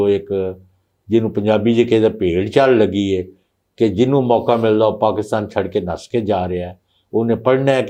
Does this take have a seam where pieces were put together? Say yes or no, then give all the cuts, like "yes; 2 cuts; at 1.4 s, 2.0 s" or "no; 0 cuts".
no; 0 cuts